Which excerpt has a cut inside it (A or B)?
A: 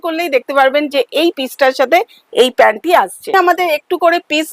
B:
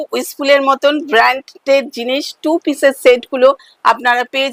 A